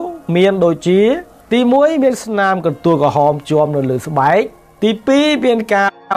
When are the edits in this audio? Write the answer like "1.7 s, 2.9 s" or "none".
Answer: 1.3 s, 4.6 s